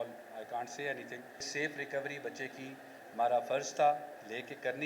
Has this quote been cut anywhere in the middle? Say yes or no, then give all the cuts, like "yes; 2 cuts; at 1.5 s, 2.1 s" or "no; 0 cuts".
yes; 1 cut; at 1.5 s